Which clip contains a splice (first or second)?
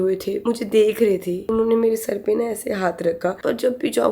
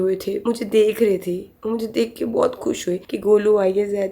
first